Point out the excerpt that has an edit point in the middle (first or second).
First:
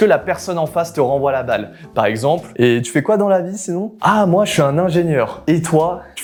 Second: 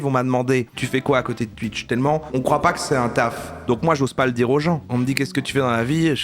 second